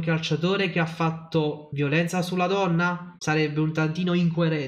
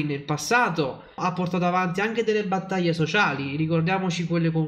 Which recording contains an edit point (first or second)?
first